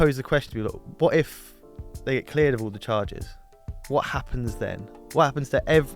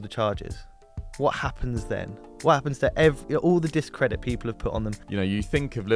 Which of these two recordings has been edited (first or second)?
second